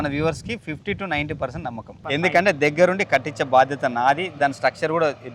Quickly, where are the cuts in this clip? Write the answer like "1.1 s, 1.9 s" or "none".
1.9 s